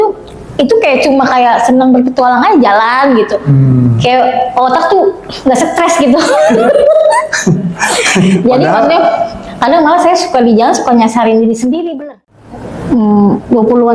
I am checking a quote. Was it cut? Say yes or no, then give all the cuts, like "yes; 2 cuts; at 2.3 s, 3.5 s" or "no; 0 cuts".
yes; 1 cut; at 11.9 s